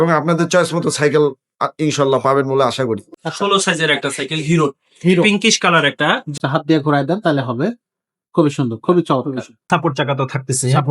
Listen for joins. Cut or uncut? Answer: cut